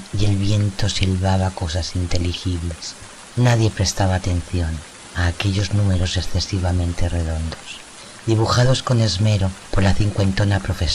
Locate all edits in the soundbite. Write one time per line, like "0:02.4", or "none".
0:00.9